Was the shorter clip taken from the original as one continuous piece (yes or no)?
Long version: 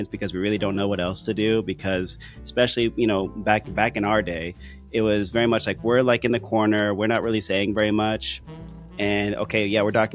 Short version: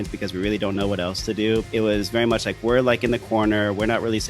no